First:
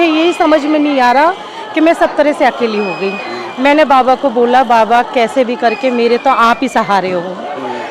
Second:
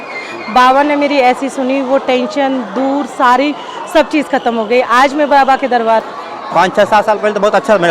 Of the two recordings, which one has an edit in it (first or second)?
second